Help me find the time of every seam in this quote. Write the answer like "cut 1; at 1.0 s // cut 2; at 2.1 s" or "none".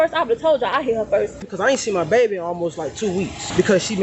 cut 1; at 1.5 s